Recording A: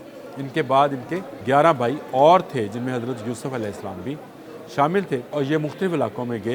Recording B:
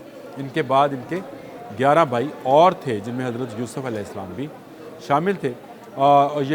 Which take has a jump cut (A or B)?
A